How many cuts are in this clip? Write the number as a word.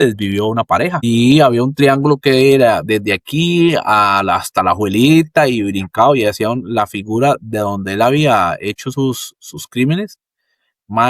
zero